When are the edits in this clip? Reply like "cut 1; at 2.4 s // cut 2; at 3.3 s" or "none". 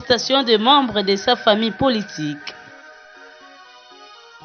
cut 1; at 2.5 s